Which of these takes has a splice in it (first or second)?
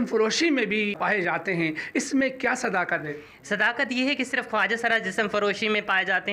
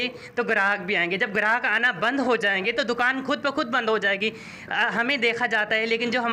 first